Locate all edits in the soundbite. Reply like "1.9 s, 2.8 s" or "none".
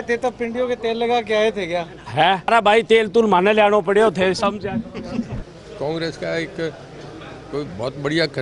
2.5 s, 5.4 s

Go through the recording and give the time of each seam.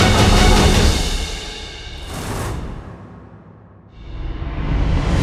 none

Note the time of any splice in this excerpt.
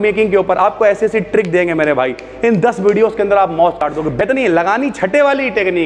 3.8 s

